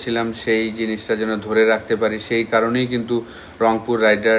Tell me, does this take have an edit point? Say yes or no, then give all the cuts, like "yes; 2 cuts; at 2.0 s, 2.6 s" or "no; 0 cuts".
no; 0 cuts